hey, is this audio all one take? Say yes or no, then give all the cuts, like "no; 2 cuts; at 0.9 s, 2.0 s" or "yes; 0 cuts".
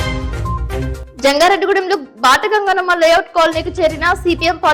no; 1 cut; at 0.9 s